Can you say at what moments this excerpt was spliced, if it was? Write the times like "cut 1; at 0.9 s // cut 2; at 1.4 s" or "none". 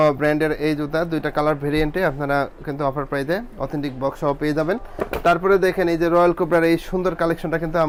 none